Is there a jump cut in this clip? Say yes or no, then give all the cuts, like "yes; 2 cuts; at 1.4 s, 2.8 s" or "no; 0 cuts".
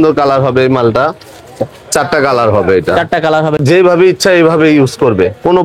yes; 1 cut; at 3.6 s